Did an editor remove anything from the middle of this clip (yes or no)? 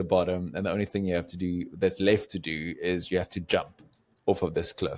no